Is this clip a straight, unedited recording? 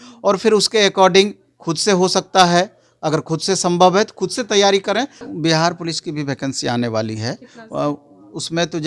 no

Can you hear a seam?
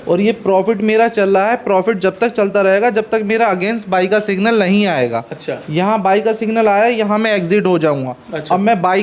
no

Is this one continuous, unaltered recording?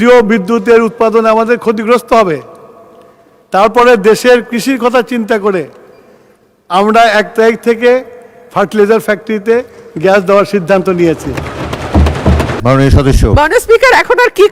no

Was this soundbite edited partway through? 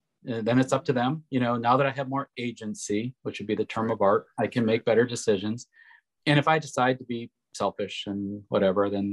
no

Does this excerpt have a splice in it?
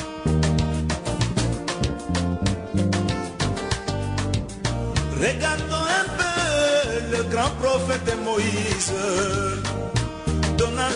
no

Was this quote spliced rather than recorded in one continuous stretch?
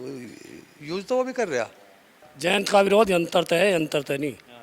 yes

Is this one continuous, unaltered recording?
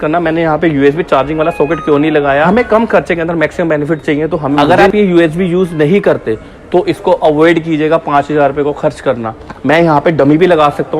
no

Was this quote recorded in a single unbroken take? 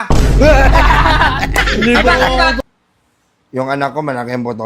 no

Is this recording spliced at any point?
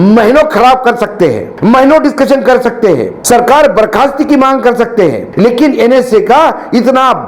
yes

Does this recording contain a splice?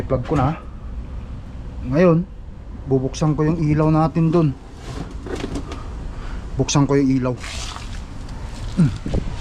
no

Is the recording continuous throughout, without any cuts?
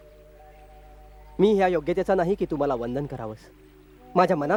yes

